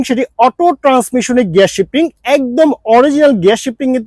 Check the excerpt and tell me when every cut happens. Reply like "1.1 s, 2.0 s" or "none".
none